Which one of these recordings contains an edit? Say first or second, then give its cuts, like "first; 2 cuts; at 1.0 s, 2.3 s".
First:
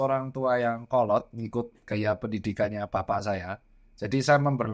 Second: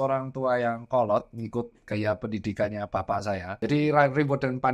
second; 1 cut; at 3.5 s